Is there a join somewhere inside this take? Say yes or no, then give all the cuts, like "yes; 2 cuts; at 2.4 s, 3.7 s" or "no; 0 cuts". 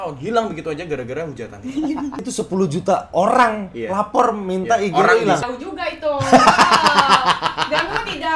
yes; 2 cuts; at 2.2 s, 5.4 s